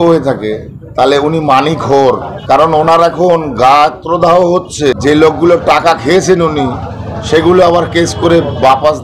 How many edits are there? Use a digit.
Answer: 2